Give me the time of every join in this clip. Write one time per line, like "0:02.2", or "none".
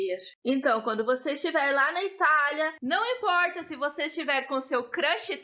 0:02.8